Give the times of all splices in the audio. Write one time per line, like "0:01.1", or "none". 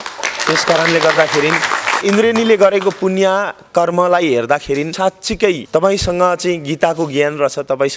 0:02.0
0:04.9